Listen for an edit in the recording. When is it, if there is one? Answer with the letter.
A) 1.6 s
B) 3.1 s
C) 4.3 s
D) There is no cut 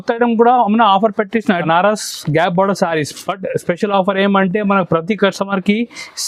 A